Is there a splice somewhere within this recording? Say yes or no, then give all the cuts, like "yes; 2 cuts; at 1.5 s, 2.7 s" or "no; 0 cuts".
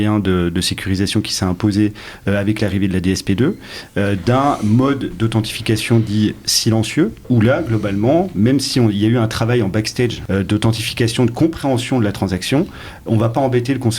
yes; 2 cuts; at 7.2 s, 10.2 s